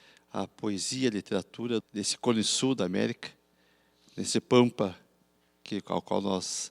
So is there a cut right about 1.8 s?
yes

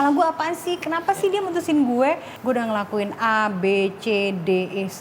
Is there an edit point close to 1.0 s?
no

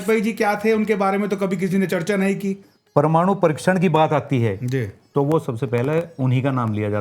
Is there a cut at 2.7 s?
yes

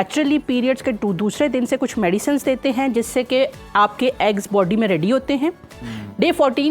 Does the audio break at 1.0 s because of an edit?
no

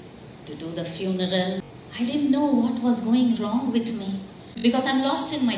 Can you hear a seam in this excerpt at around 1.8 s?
yes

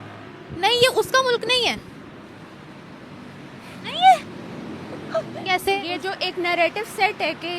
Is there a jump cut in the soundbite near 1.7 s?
no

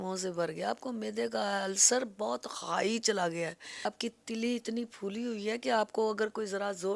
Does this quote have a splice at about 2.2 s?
no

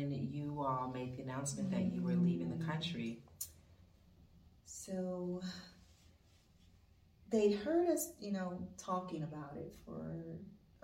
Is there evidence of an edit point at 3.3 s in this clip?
yes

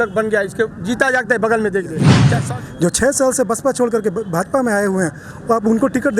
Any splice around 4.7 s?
no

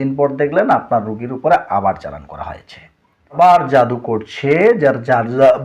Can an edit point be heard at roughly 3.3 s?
yes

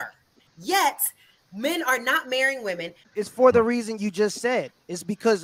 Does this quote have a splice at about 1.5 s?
no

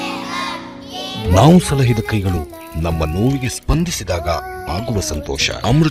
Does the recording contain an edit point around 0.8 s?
no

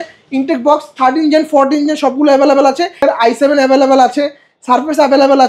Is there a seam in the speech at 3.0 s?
yes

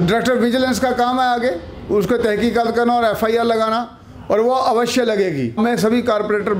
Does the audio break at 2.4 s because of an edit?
no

